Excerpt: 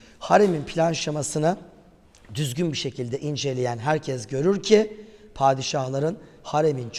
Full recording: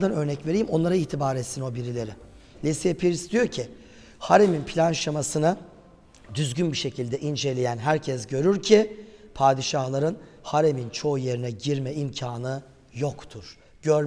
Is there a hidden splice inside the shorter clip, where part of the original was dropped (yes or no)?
no